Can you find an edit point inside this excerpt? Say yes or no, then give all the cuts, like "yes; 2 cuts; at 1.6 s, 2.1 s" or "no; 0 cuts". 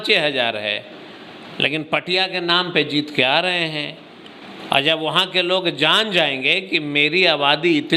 no; 0 cuts